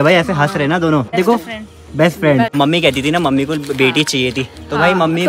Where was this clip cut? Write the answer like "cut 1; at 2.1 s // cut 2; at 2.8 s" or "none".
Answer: cut 1; at 1.1 s // cut 2; at 2.5 s

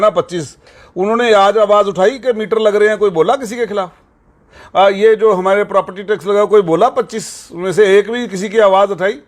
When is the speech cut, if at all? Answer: none

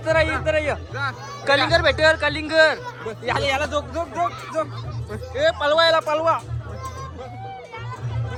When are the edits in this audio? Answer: none

